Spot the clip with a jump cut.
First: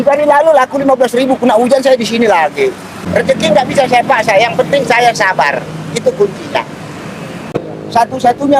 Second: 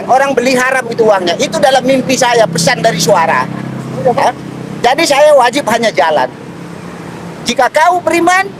first; 2 cuts; at 3.0 s, 7.5 s

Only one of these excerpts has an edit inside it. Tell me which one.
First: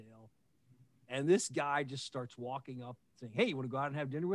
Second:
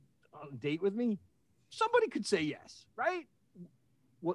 second; 1 cut; at 3.3 s

